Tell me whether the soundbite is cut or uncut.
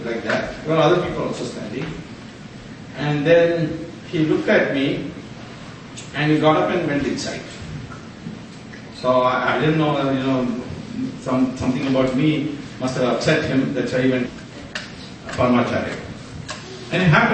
uncut